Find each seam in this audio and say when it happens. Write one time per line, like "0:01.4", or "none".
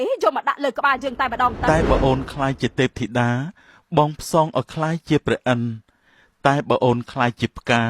0:01.7